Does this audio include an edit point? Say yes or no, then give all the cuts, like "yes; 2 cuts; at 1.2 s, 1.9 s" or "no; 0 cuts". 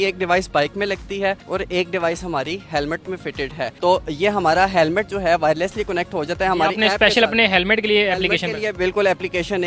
no; 0 cuts